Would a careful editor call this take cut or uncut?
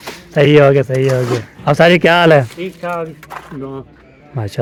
uncut